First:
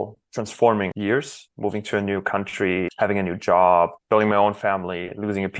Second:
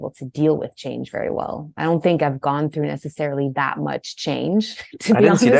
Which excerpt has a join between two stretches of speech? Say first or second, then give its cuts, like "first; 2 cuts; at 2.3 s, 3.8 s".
first; 3 cuts; at 1.2 s, 2.9 s, 4.0 s